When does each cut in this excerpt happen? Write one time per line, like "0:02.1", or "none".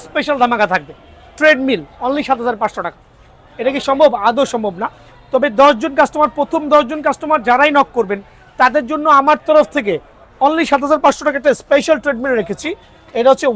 none